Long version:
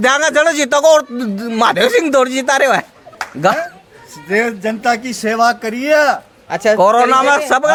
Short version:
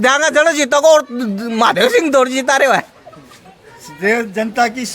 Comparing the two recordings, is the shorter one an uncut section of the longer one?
no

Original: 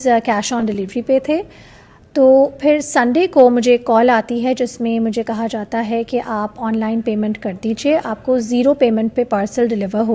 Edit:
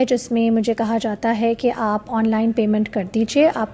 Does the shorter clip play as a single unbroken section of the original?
yes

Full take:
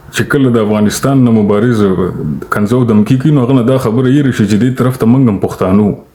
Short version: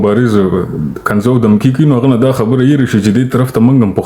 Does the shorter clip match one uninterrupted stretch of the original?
yes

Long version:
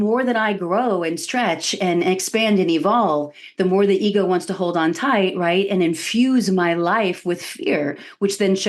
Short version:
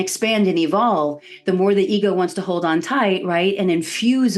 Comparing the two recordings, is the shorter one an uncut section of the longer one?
yes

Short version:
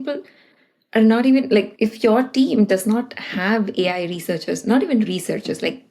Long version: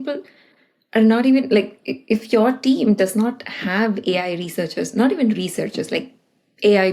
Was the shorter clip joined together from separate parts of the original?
yes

